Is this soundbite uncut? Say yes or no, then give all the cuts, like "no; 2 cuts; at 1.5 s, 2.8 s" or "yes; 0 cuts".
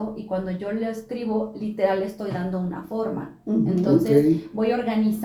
yes; 0 cuts